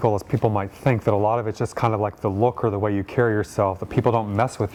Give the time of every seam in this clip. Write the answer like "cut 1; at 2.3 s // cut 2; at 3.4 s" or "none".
none